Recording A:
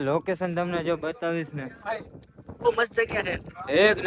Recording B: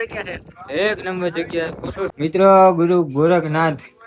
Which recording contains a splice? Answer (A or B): B